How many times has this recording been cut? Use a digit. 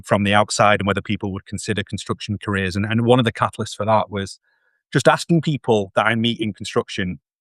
0